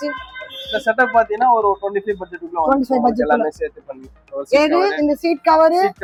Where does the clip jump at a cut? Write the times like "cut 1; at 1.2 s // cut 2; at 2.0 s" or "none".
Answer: none